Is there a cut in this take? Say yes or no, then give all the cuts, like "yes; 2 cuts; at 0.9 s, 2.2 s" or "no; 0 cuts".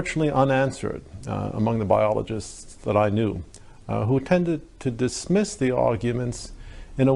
yes; 1 cut; at 5.3 s